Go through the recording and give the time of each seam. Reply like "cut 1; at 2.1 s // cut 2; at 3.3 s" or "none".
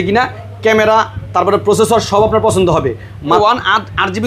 cut 1; at 3.4 s